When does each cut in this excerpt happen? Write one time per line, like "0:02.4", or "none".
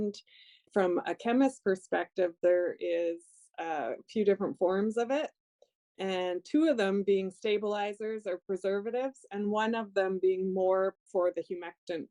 none